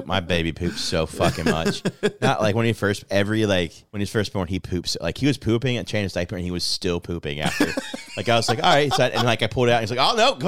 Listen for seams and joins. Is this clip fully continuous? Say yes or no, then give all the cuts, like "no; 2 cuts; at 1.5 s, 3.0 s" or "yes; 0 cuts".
no; 1 cut; at 3.8 s